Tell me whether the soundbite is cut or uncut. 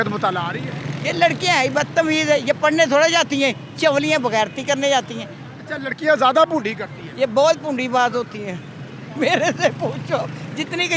uncut